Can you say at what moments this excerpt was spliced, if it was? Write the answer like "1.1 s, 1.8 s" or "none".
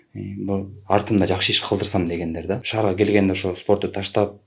2.7 s